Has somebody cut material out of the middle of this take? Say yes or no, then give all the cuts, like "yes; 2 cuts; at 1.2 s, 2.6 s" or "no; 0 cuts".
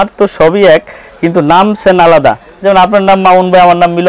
no; 0 cuts